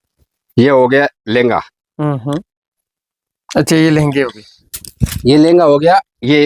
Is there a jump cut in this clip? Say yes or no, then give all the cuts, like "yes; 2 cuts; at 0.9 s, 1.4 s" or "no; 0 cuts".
no; 0 cuts